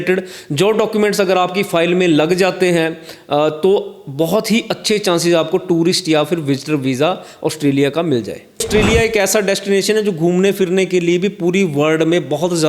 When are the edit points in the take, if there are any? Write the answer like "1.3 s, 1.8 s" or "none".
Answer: 8.7 s